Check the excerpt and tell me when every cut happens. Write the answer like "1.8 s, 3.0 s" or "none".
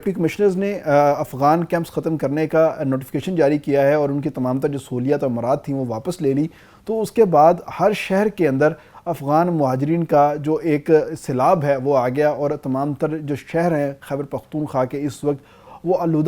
none